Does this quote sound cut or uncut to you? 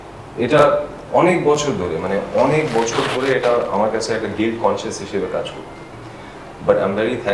uncut